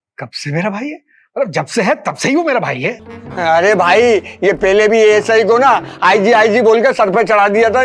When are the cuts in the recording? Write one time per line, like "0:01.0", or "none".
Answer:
0:03.0